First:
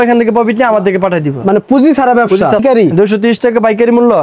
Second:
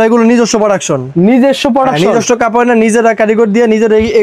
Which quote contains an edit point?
first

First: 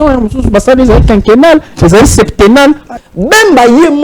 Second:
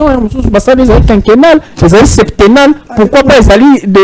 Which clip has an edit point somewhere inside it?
first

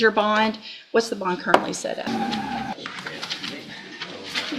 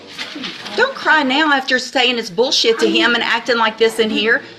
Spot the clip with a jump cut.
first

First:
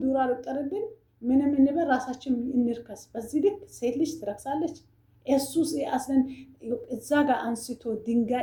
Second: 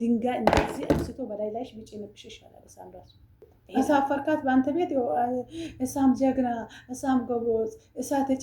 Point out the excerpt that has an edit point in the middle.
second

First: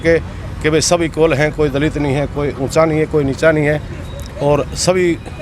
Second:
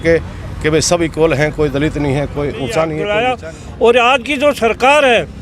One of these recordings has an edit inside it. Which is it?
second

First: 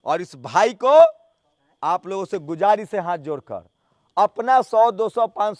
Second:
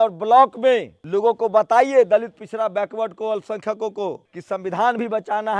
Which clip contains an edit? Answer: second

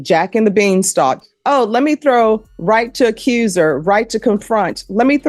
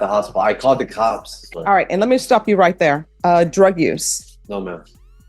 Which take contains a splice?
second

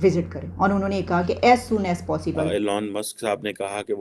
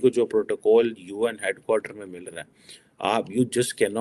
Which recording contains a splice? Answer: first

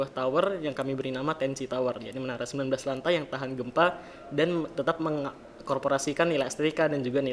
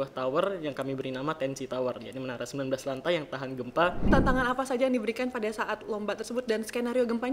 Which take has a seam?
second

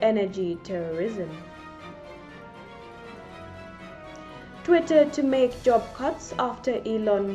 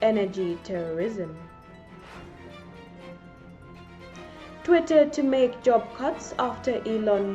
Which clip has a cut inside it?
first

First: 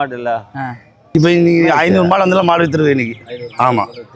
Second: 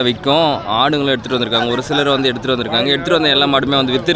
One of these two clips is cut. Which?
first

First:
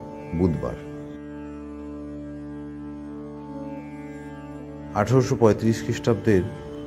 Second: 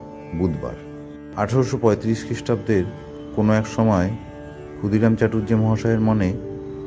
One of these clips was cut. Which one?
second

